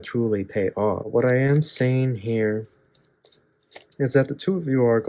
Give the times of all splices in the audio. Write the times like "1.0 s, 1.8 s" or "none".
1.1 s